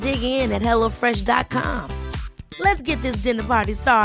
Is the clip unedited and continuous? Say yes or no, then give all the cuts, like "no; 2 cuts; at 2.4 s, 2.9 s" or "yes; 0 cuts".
yes; 0 cuts